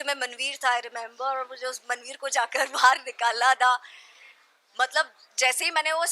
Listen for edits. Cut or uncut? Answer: uncut